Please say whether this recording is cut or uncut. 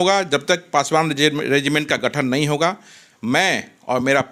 uncut